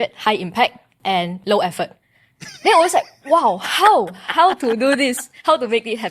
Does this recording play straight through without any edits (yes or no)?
no